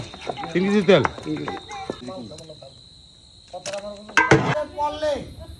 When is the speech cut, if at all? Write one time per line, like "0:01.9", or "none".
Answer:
0:02.0